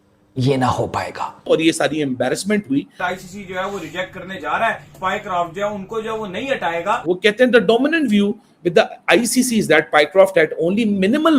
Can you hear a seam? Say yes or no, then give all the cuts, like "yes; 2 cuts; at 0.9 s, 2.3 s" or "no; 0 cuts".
yes; 4 cuts; at 1.4 s, 3.0 s, 5.0 s, 7.2 s